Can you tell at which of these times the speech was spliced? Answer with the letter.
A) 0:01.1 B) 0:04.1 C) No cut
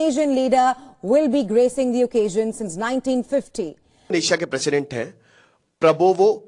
B